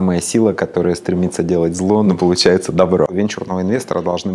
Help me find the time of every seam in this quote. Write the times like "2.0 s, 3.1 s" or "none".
2.1 s, 3.1 s